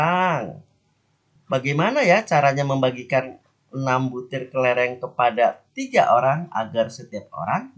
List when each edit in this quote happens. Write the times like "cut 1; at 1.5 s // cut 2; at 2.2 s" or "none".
none